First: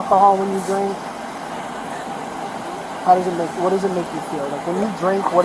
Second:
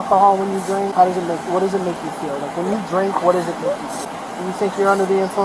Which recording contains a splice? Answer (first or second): second